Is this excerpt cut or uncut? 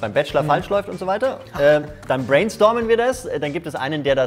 uncut